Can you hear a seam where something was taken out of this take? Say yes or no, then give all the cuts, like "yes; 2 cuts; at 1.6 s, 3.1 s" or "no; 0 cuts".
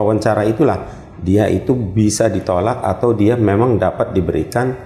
no; 0 cuts